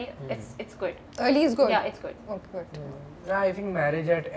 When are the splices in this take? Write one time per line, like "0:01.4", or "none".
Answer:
none